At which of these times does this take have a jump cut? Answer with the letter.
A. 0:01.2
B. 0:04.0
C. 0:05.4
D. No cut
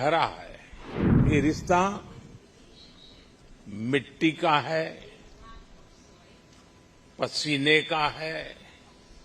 A